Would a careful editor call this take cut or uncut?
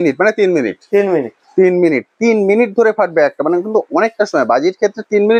uncut